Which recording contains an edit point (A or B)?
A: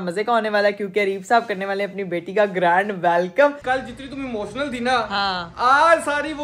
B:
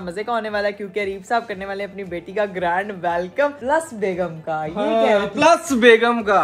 A